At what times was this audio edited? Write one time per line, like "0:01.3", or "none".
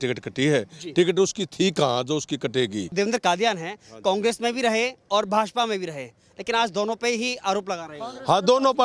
0:02.9